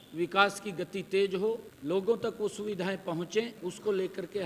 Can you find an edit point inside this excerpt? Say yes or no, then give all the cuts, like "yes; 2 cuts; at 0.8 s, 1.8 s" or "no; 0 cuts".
yes; 2 cuts; at 1.7 s, 3.5 s